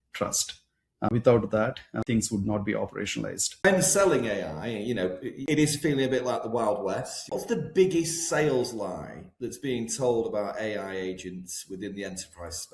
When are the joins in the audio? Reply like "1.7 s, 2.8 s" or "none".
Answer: 1.1 s, 2.0 s, 3.6 s, 5.4 s, 7.3 s